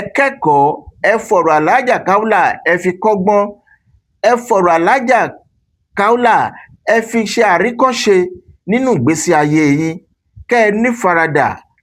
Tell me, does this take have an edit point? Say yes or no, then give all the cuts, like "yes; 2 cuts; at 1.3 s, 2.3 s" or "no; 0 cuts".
no; 0 cuts